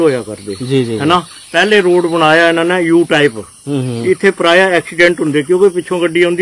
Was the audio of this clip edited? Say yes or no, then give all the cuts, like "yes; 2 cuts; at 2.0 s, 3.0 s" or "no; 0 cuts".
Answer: no; 0 cuts